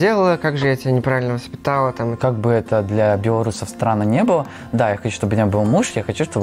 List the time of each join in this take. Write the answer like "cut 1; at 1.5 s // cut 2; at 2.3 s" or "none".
cut 1; at 2.1 s